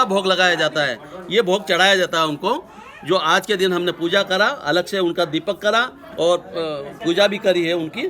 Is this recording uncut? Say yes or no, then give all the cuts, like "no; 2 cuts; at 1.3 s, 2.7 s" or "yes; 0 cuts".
yes; 0 cuts